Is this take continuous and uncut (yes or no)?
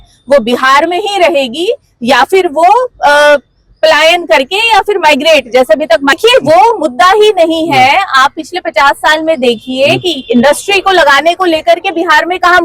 no